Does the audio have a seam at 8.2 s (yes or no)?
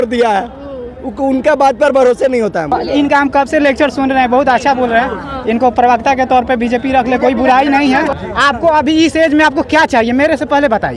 yes